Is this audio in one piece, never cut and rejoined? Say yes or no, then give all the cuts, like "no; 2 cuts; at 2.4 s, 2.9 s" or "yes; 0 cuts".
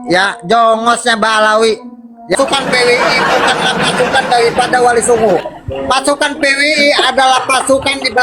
no; 1 cut; at 2.4 s